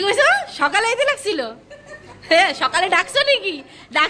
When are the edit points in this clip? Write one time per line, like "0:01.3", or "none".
none